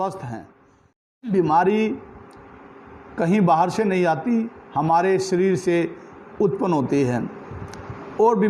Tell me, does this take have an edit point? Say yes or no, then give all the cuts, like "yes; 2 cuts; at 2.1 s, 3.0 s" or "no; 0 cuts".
yes; 1 cut; at 1.3 s